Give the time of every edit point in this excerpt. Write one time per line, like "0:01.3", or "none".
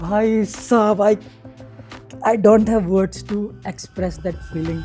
none